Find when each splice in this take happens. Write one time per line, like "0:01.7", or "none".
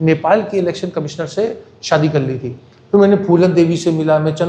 0:02.7

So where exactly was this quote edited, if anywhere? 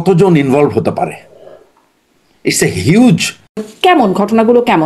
0:03.6

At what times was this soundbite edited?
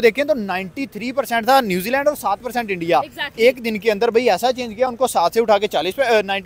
none

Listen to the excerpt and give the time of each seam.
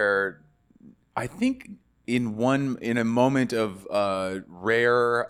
none

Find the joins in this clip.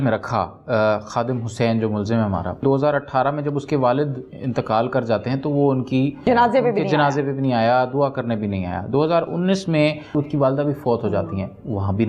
0:02.6
0:06.2
0:10.1

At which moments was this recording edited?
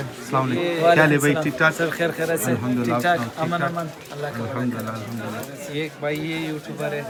none

